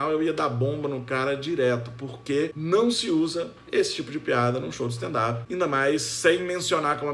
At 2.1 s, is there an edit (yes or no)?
no